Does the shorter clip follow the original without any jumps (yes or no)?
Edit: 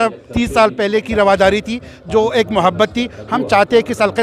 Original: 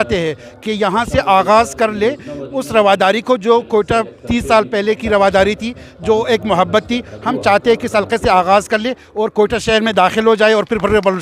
yes